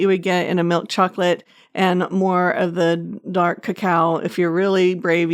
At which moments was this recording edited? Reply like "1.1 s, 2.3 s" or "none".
none